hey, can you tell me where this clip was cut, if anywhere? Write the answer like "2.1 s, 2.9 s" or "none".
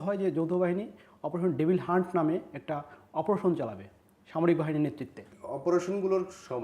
5.3 s